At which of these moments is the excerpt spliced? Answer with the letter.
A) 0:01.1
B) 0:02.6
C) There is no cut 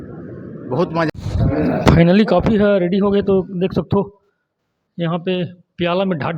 A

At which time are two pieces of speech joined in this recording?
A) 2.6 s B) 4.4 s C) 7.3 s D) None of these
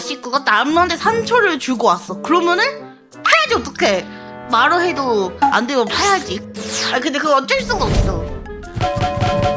D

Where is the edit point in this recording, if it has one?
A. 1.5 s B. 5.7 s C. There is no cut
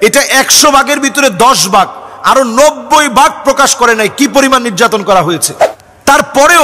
B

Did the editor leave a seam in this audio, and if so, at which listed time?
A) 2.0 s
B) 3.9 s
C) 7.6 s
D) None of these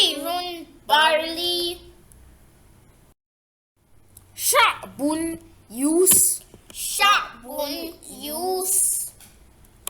A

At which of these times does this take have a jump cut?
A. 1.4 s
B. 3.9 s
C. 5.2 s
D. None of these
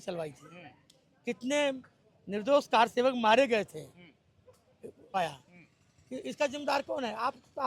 C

